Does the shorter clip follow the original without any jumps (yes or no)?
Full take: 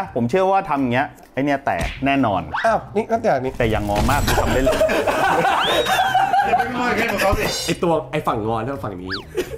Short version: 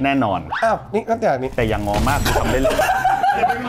no